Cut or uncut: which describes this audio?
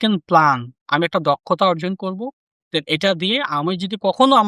uncut